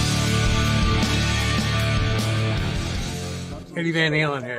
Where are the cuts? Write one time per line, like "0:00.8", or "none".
0:03.5